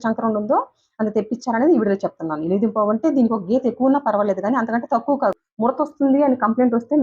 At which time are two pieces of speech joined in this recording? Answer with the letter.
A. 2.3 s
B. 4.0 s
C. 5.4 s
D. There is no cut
C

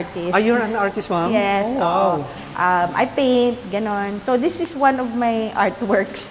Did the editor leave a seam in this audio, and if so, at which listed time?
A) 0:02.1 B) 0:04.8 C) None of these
C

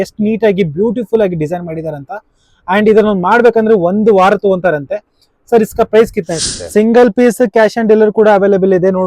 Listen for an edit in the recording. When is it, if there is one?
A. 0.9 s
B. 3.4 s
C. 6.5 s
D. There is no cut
C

